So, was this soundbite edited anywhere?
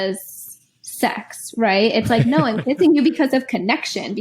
no; 0 cuts

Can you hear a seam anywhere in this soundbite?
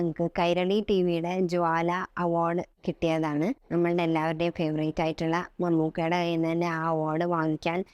yes; 2 cuts; at 2.7 s, 3.6 s

